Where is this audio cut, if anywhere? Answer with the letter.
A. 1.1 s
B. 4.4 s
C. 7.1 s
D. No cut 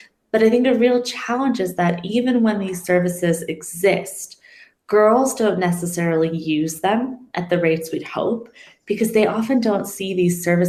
D